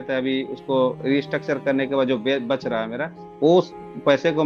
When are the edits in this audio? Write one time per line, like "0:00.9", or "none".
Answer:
none